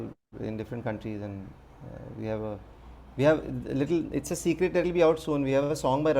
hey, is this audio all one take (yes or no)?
yes